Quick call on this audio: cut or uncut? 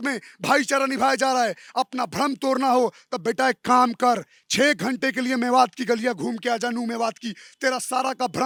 uncut